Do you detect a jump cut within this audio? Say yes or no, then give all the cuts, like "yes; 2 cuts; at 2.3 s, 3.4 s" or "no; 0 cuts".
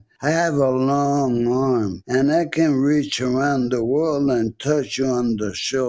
no; 0 cuts